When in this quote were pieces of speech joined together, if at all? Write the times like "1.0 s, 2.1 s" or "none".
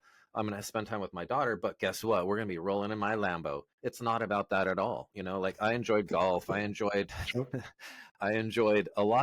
none